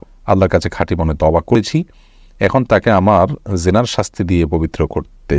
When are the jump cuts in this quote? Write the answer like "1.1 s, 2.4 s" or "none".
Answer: 1.5 s